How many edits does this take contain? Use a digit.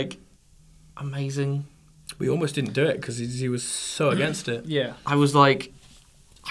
1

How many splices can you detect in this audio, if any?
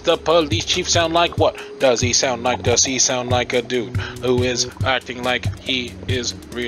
0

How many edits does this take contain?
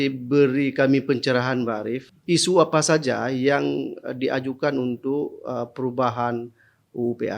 1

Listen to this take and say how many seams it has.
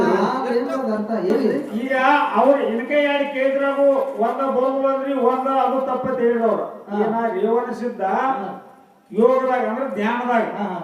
1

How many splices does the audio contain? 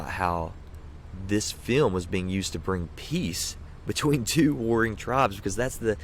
0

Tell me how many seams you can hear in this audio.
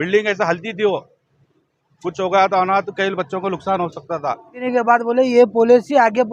1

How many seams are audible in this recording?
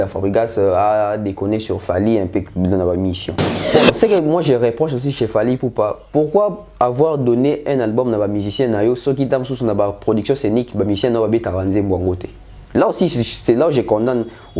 1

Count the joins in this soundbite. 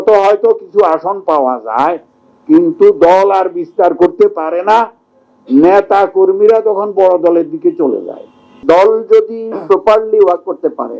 1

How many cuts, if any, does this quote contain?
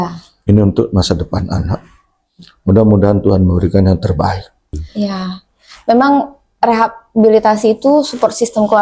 1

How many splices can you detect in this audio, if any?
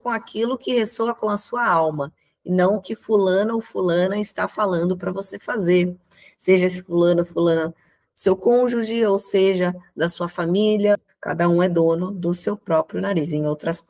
1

